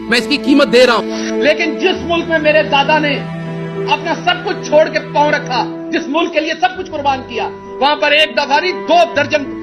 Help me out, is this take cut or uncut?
uncut